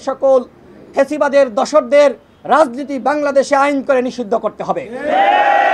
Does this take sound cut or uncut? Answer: uncut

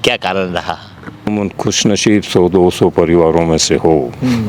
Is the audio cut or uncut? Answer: cut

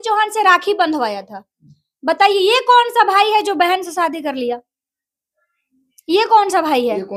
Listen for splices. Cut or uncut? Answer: uncut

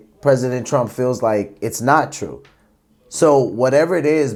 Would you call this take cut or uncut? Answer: uncut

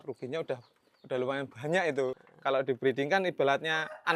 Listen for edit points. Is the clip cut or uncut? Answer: cut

